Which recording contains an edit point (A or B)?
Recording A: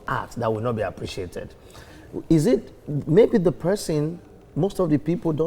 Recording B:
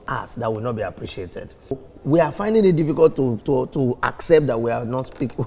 B